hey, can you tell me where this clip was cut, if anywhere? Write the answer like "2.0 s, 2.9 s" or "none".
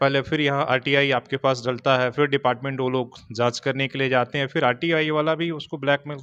none